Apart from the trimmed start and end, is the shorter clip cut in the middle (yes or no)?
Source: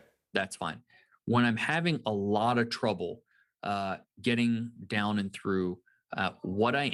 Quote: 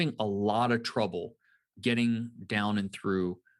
yes